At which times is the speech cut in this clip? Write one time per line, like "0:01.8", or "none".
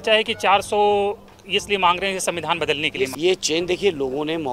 0:03.1